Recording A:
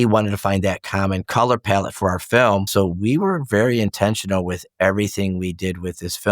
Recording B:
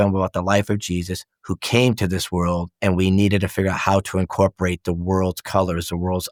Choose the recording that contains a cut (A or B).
A